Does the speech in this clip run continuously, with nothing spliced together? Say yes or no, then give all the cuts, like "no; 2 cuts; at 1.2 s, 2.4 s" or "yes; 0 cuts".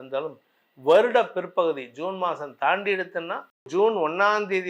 no; 1 cut; at 3.7 s